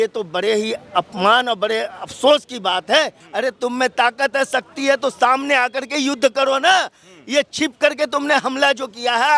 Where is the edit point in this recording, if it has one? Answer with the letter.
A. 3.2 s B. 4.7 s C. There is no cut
A